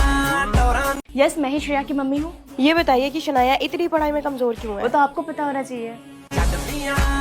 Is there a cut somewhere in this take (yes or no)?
yes